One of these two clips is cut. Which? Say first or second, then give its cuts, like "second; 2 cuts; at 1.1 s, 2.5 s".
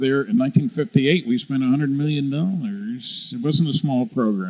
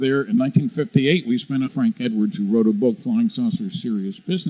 first; 1 cut; at 1.6 s